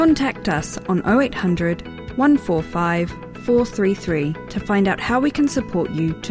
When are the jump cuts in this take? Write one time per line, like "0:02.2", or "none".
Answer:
none